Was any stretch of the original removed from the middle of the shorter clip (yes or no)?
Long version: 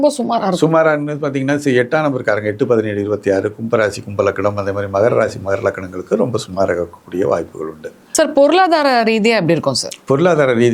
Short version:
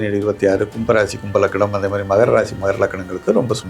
no